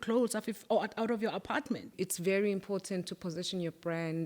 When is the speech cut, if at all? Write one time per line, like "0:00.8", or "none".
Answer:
0:01.9